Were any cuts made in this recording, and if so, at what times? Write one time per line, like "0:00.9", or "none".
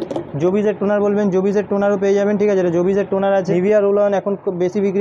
0:03.5

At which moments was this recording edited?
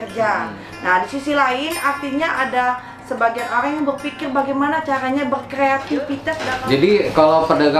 0:06.4

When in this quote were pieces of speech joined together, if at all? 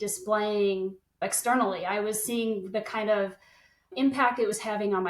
0:01.2
0:03.9

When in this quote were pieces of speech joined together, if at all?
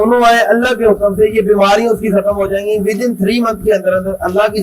none

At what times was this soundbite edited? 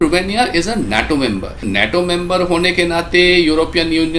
0:01.6

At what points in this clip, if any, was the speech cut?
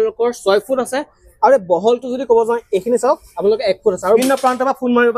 0:04.2

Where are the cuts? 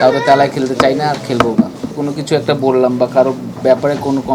0:01.9

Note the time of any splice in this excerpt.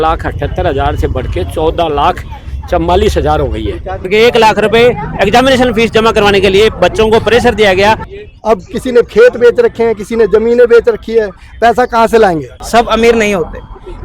0:04.0
0:08.1
0:12.5

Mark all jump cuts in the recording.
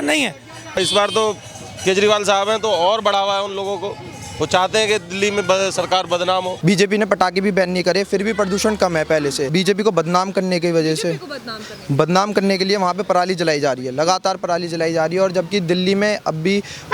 0:00.8
0:06.5
0:09.5

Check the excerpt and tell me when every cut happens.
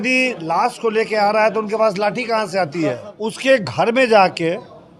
0:03.1

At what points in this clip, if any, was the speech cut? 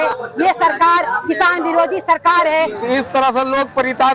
0:02.8

